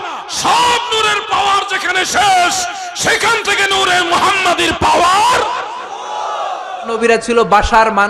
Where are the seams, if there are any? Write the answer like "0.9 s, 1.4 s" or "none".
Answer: 7.0 s